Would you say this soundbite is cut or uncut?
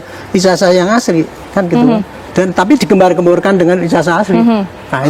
uncut